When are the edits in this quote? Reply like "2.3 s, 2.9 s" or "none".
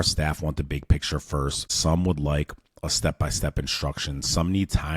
1.7 s